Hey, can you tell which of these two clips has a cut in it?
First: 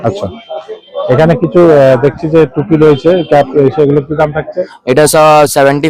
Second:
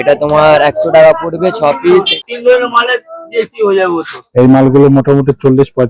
second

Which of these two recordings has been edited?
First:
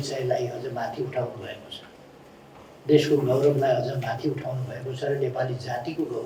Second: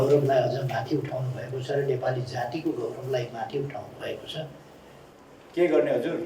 second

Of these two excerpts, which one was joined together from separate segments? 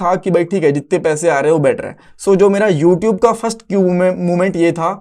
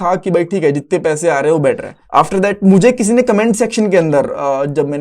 second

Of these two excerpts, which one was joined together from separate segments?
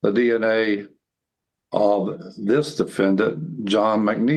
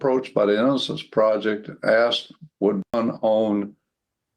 second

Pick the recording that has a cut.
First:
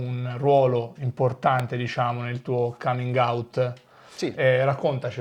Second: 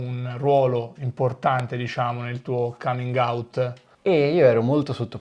second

